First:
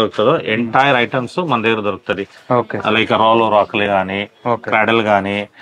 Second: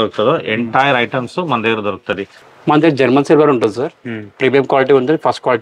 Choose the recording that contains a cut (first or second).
second